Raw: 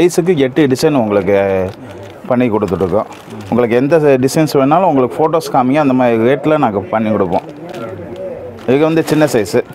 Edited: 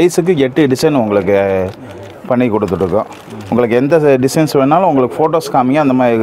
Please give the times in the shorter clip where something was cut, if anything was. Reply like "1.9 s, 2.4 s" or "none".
none